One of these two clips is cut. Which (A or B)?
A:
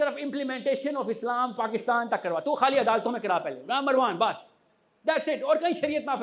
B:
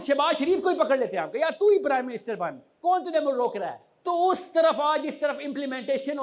B